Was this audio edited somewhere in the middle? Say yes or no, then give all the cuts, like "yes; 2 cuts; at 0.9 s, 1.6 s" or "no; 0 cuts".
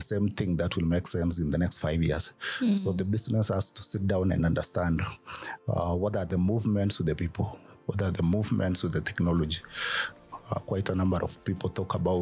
no; 0 cuts